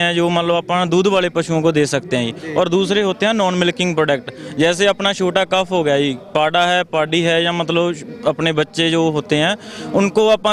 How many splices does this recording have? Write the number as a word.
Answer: zero